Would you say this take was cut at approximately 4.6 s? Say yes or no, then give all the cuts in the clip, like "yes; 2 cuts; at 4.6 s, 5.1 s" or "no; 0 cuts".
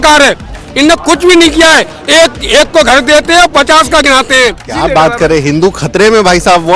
yes; 1 cut; at 4.6 s